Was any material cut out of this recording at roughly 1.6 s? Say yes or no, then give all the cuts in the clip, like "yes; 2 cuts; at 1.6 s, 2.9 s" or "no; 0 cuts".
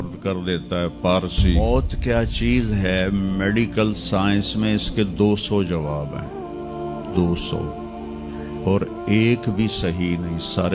yes; 1 cut; at 1.6 s